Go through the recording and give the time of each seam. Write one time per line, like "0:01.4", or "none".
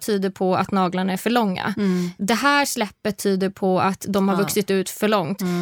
0:02.1